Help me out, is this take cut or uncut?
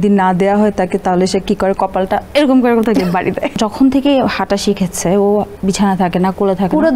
cut